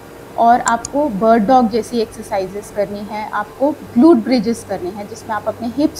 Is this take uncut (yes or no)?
yes